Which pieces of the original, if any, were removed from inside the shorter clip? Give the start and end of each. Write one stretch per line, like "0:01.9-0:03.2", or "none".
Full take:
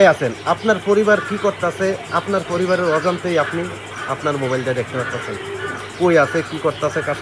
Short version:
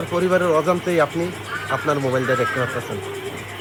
none